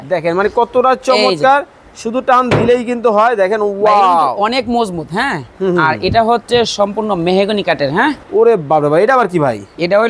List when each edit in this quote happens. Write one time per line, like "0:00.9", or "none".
0:08.2